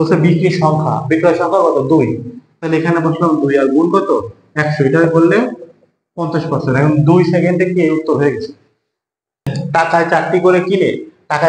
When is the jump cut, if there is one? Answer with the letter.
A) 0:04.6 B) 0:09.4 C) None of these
B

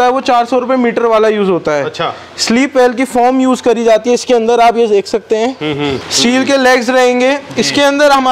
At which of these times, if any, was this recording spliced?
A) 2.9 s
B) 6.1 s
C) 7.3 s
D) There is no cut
B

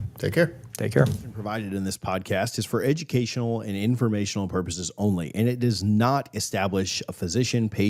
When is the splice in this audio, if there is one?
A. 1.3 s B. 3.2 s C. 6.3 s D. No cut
A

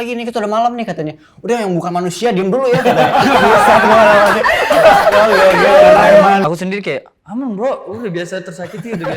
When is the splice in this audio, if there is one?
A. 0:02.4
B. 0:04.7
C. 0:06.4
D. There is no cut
C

